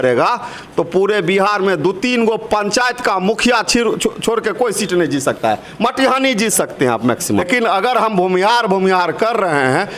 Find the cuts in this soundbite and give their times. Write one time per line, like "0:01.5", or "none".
0:07.5